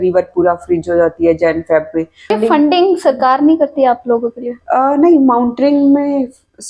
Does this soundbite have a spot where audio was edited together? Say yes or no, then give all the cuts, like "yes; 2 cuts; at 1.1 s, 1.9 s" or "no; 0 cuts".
yes; 1 cut; at 2.3 s